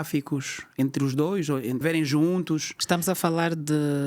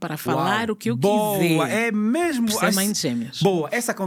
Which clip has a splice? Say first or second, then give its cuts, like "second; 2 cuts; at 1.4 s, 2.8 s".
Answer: first; 1 cut; at 1.8 s